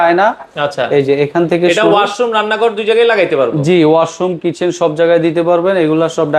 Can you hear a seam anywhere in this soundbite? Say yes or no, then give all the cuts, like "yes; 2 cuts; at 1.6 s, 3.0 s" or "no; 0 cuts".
no; 0 cuts